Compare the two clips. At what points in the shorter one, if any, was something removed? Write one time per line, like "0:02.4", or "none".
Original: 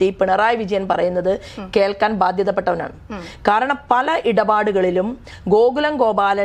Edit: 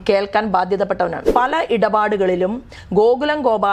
0:01.3